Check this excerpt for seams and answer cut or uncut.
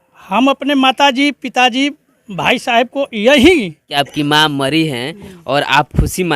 cut